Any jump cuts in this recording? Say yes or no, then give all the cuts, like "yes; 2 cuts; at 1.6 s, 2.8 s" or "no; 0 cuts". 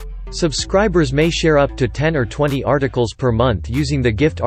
no; 0 cuts